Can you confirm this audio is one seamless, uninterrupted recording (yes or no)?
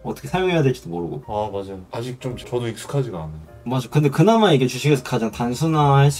yes